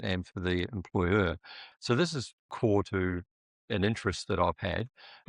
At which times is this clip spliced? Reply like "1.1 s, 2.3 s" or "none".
1.7 s, 2.4 s